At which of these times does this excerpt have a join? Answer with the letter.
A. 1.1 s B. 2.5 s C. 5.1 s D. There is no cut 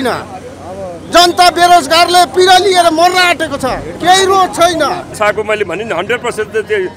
C